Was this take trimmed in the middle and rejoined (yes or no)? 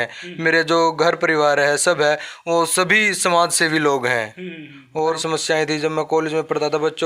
yes